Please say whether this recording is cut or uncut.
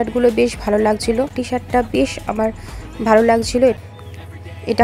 cut